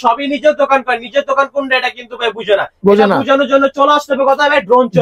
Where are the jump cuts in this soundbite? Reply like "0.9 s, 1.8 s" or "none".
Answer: none